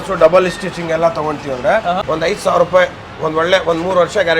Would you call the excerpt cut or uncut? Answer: cut